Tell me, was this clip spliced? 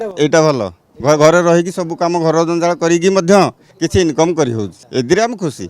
yes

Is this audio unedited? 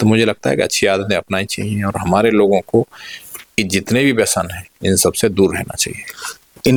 yes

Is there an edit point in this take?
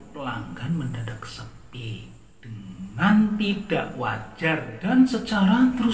no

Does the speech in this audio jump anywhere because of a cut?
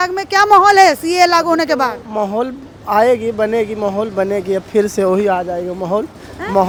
no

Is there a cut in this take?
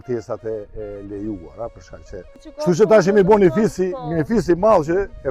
yes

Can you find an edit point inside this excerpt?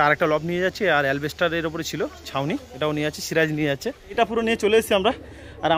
yes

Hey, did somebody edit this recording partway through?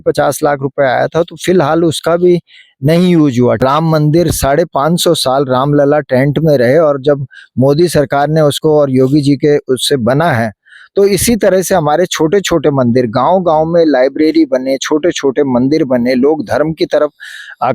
yes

